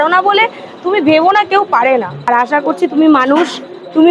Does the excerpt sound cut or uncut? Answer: cut